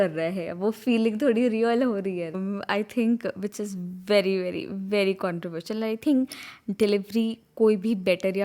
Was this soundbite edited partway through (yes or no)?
yes